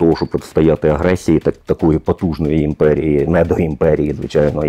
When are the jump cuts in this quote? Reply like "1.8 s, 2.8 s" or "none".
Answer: none